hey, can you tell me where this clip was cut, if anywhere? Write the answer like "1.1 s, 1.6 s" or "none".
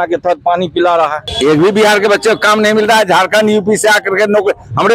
1.3 s

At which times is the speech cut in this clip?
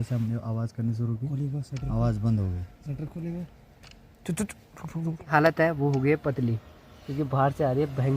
5.3 s

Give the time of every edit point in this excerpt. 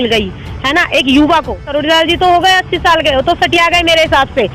1.7 s

